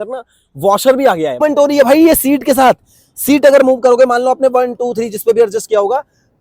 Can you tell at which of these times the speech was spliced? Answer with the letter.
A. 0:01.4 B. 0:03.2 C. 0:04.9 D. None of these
A